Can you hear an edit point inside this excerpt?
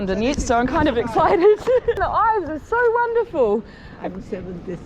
yes; 1 cut; at 2.0 s

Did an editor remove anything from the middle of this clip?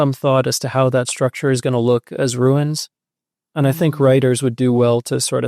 yes; 1 cut; at 3.4 s

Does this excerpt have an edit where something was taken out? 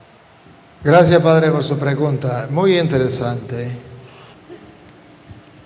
yes; 1 cut; at 4.3 s

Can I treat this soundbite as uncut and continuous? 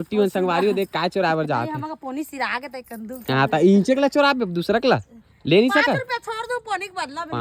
yes; 0 cuts

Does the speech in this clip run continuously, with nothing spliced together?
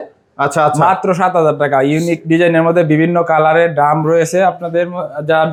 yes; 0 cuts

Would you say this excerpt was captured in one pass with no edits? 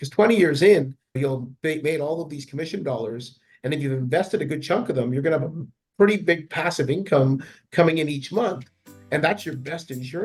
yes; 0 cuts

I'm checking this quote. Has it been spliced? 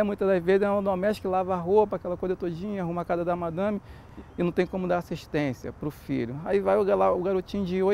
yes; 1 cut; at 4.1 s

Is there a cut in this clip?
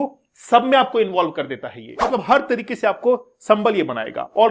yes; 1 cut; at 2.0 s

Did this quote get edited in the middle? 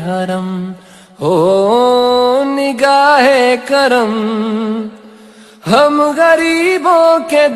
no; 0 cuts

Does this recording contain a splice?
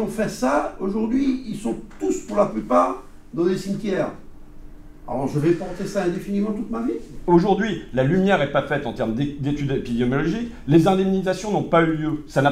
no; 0 cuts

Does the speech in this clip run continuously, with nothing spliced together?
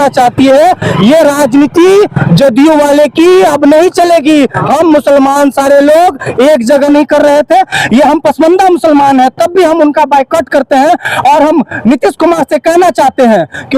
no; 1 cut; at 6.9 s

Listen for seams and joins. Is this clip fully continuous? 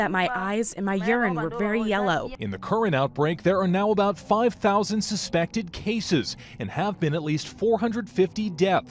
no; 1 cut; at 2.4 s

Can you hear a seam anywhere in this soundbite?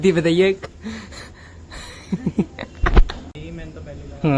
yes; 1 cut; at 3.4 s

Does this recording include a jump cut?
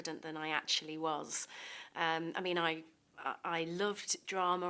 no; 0 cuts

